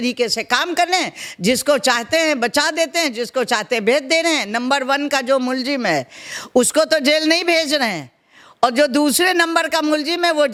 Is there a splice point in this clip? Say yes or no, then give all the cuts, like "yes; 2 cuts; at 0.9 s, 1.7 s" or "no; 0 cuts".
no; 0 cuts